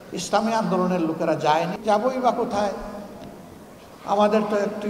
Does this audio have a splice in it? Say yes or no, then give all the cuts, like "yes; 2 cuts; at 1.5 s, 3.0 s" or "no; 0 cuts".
yes; 1 cut; at 1.7 s